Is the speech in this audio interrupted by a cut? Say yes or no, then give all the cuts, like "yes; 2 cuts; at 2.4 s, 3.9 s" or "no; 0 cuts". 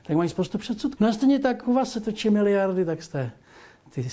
yes; 1 cut; at 0.9 s